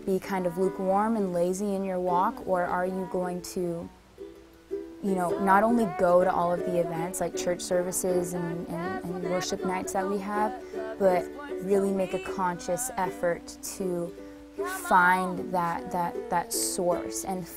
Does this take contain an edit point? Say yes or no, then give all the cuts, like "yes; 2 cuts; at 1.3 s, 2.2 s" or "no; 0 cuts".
no; 0 cuts